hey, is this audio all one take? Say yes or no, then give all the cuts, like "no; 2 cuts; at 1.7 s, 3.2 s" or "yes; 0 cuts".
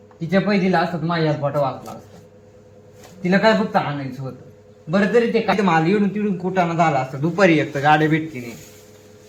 yes; 0 cuts